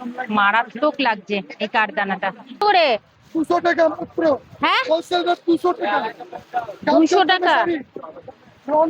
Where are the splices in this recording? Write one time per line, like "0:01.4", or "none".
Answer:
0:02.6